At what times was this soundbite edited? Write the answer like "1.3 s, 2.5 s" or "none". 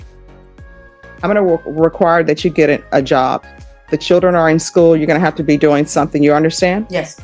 1.2 s